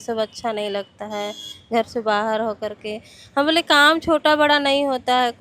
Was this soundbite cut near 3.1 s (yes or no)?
no